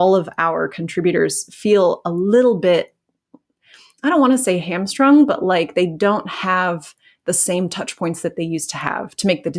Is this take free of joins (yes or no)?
yes